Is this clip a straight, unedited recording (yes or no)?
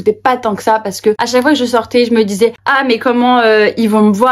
no